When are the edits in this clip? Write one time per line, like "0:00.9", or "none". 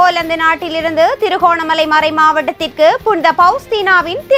none

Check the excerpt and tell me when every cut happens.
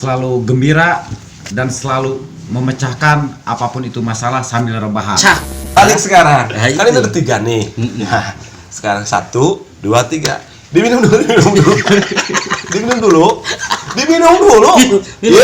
0:05.6

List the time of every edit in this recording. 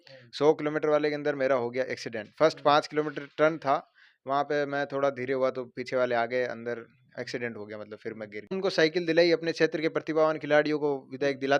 0:08.6

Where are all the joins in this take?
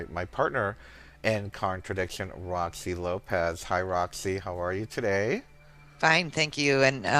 0:01.9

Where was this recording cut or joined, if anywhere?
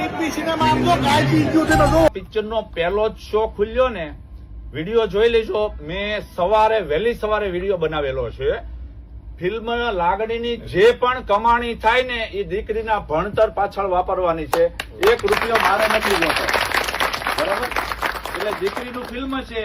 0:02.1

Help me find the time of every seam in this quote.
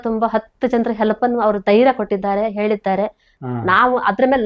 0:03.4

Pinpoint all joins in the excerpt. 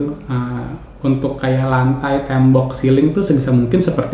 none

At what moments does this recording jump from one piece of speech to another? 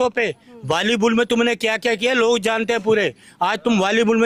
none

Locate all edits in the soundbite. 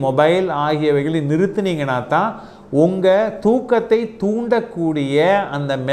none

